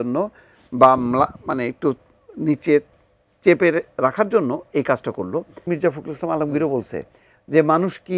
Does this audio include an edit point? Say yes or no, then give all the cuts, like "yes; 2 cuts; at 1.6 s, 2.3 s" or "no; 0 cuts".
yes; 1 cut; at 5.6 s